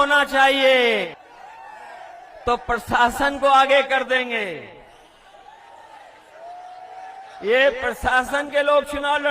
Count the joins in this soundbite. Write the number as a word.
one